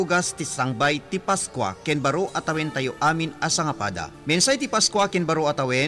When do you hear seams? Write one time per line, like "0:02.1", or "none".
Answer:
none